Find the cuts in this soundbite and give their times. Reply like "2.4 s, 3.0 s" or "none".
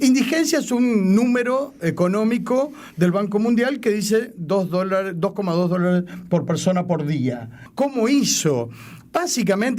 7.6 s

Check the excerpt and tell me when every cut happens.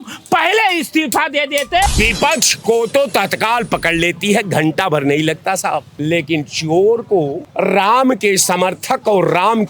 1.9 s, 5.9 s, 7.4 s

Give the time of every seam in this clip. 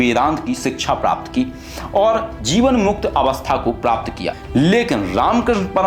4.4 s

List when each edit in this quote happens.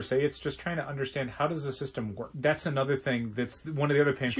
2.3 s

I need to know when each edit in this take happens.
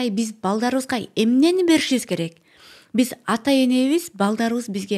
none

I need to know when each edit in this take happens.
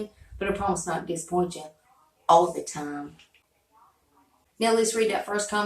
3.5 s, 4.5 s

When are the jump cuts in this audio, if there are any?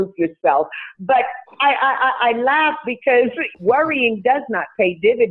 3.5 s

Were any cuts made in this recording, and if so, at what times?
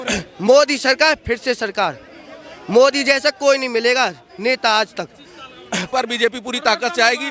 5.8 s

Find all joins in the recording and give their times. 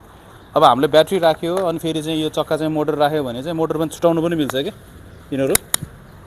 none

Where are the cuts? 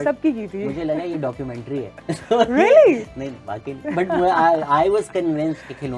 none

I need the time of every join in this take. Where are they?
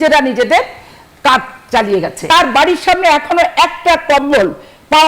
2.2 s

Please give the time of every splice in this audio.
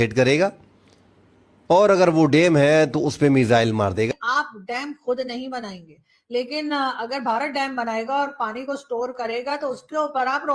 4.1 s

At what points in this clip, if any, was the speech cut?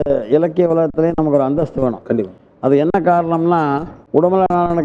none

